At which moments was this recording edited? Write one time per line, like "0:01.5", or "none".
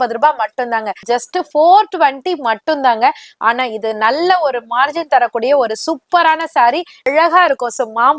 0:01.0
0:07.1